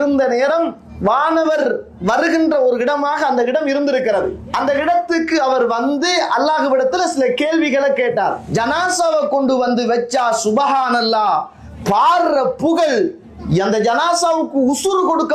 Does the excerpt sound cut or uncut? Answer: cut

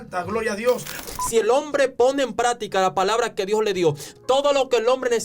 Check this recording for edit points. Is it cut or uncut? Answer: cut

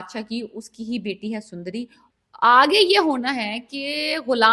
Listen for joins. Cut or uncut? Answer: cut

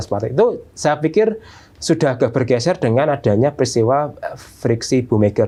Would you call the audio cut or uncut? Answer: uncut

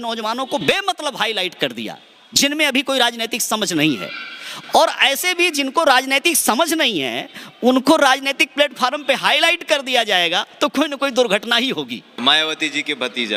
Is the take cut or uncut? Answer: uncut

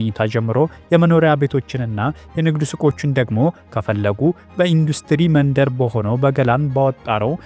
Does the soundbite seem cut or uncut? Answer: uncut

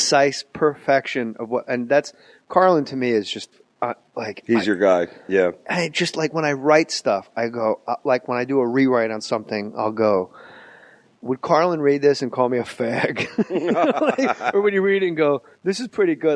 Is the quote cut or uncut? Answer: cut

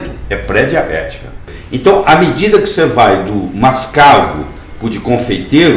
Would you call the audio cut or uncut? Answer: cut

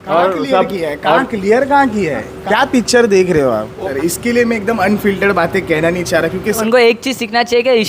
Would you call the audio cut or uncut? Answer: cut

